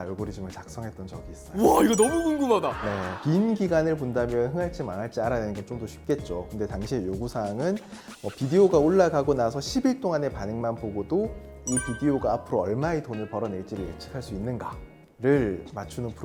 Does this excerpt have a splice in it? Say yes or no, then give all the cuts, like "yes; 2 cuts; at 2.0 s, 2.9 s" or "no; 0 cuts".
no; 0 cuts